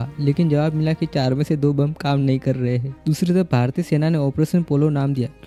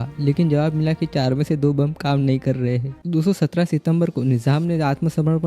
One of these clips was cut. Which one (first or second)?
second